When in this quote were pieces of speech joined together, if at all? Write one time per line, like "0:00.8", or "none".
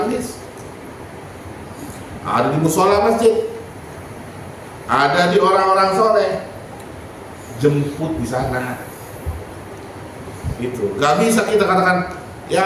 none